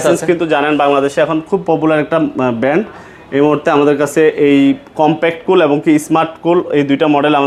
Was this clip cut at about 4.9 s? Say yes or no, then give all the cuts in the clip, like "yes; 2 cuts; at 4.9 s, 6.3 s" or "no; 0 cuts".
no; 0 cuts